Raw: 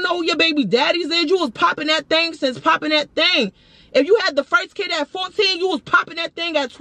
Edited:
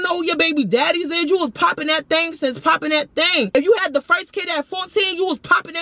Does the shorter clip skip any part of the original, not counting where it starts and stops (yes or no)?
yes